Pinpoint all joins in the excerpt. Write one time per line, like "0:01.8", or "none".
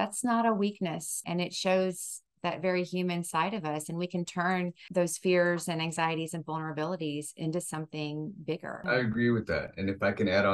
0:01.2
0:04.8
0:08.8